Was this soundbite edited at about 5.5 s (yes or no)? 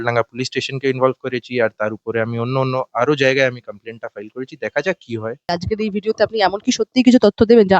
yes